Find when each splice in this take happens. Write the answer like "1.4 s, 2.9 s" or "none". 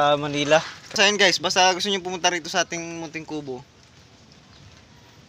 1.0 s